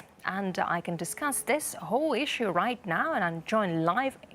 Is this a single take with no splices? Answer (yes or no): no